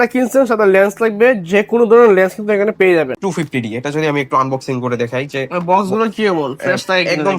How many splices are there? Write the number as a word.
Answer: one